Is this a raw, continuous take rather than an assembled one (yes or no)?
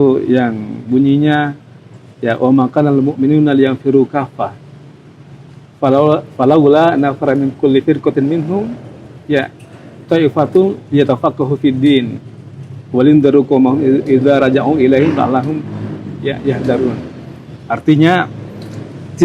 yes